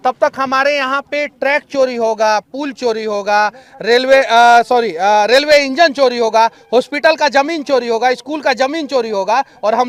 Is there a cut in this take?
no; 0 cuts

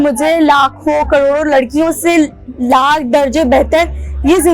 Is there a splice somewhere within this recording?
no; 0 cuts

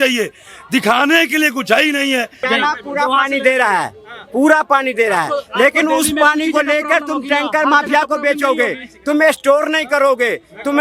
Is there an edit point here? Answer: yes; 1 cut; at 2.3 s

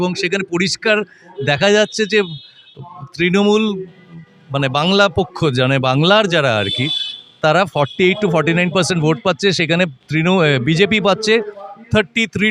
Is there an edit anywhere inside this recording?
no; 0 cuts

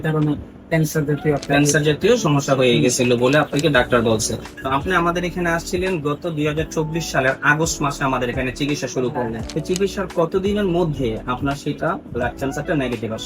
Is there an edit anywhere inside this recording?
yes; 2 cuts; at 4.5 s, 9.4 s

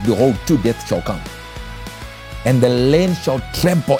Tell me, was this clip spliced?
no; 0 cuts

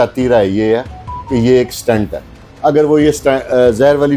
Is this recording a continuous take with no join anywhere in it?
no; 1 cut; at 2.4 s

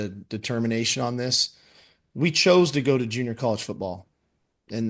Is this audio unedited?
yes; 0 cuts

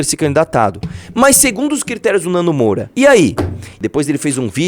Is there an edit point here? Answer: yes; 2 cuts; at 2.9 s, 3.8 s

